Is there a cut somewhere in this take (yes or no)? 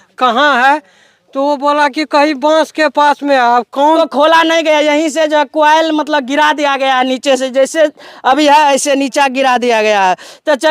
yes